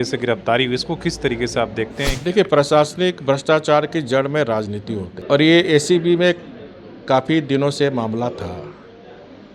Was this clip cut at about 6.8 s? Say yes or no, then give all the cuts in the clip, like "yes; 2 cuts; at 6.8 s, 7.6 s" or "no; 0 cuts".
no; 2 cuts; at 2.1 s, 5.1 s